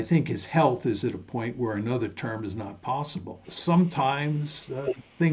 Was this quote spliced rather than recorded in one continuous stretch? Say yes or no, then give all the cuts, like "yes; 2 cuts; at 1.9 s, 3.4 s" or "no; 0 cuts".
yes; 1 cut; at 3.5 s